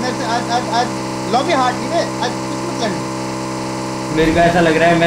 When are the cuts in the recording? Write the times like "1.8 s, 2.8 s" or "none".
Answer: none